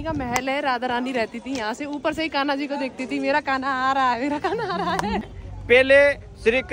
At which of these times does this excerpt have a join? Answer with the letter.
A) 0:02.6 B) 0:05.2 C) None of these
B